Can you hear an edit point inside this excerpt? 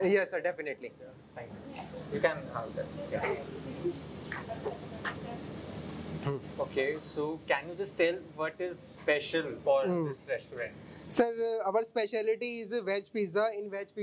no; 0 cuts

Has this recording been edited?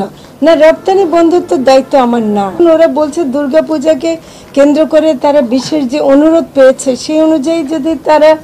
yes; 1 cut; at 2.6 s

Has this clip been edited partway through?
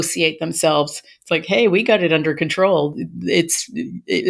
no; 0 cuts

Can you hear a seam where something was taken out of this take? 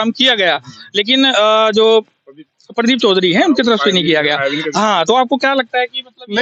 no; 0 cuts

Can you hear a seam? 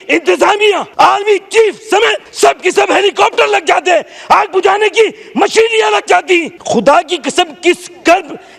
yes; 3 cuts; at 0.9 s, 2.2 s, 6.5 s

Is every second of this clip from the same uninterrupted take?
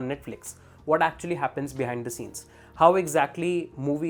yes; 0 cuts

